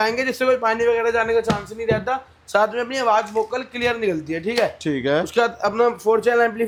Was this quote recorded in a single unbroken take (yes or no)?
yes